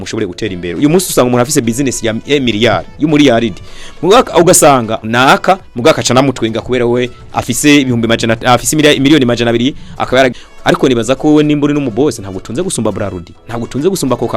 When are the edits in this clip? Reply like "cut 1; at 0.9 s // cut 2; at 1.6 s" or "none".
cut 1; at 4.9 s // cut 2; at 10.3 s